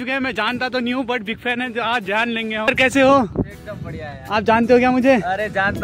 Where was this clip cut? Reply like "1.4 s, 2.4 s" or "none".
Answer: 2.7 s